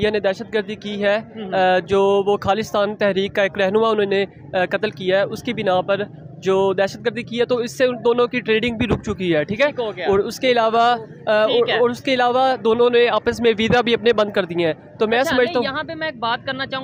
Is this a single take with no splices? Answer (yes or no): yes